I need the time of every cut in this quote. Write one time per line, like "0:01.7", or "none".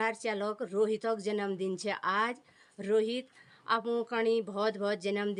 none